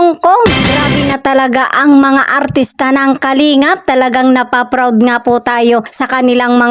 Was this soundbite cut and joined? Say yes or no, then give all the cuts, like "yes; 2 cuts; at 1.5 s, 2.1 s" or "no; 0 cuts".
no; 0 cuts